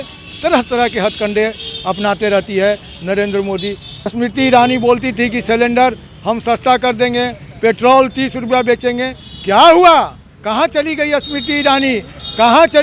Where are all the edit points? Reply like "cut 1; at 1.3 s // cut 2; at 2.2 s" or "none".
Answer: cut 1; at 4.1 s